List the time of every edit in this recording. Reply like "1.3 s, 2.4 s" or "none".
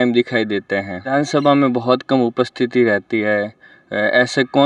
1.0 s